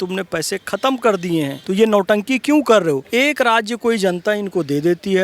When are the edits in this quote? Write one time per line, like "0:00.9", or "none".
0:01.6
0:03.0